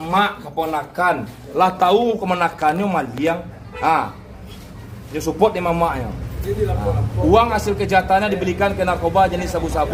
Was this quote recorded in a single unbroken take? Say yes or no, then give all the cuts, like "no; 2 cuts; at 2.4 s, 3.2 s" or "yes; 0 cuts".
yes; 0 cuts